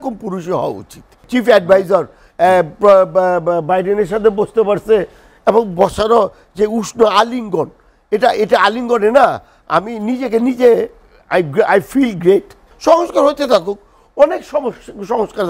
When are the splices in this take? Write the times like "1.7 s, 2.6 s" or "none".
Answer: 1.2 s, 12.7 s